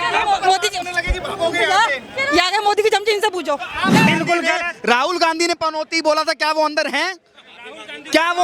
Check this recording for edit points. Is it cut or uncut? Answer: cut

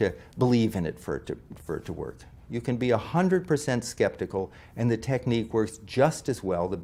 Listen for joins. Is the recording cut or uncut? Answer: uncut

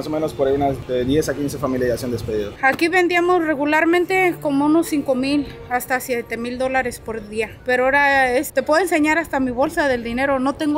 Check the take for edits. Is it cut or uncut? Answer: cut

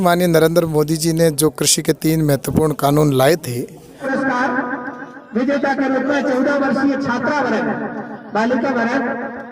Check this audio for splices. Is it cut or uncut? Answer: cut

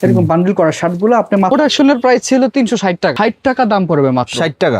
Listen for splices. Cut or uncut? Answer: cut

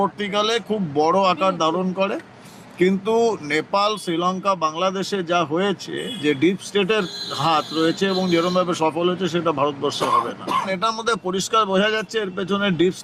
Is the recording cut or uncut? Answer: uncut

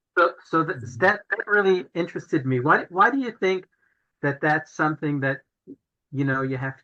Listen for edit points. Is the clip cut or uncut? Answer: uncut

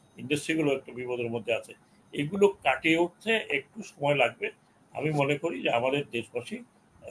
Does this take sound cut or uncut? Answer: uncut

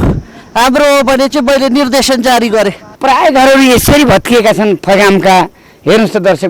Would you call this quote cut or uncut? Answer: cut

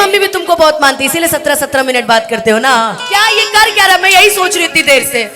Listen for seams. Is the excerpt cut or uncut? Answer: cut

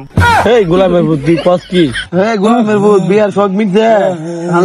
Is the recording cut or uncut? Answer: cut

